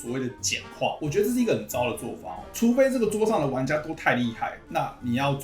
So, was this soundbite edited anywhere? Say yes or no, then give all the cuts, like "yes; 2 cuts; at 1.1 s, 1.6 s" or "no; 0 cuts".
yes; 1 cut; at 1.0 s